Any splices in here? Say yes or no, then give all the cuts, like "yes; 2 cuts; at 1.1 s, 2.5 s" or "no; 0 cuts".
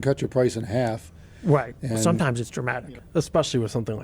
yes; 1 cut; at 2.8 s